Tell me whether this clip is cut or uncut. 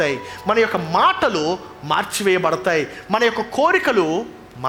uncut